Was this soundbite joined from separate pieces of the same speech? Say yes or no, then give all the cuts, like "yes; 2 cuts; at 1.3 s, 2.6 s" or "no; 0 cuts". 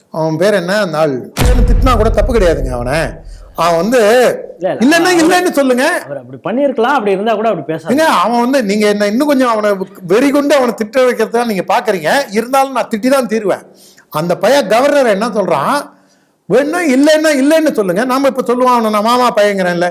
yes; 1 cut; at 1.7 s